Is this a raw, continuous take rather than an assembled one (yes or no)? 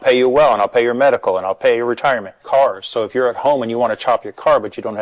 no